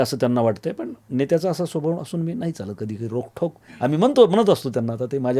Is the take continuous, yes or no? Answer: yes